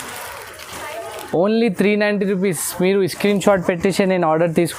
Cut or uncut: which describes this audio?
uncut